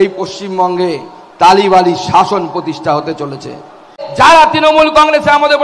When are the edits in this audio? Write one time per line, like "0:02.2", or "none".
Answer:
0:04.0